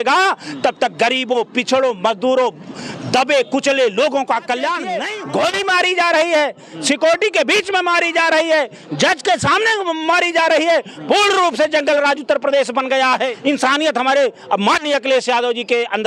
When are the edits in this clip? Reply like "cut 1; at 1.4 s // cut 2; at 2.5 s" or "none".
cut 1; at 5.1 s // cut 2; at 13.3 s